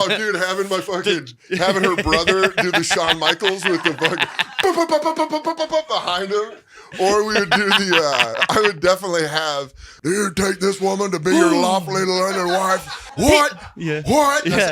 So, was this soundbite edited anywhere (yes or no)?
yes